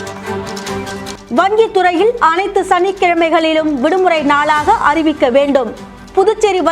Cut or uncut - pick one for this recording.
cut